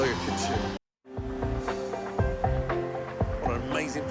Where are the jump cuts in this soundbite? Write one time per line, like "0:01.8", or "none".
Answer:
0:00.9